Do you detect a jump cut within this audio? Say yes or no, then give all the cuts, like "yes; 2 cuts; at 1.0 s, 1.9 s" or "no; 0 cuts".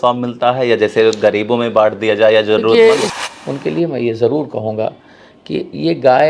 yes; 1 cut; at 3.1 s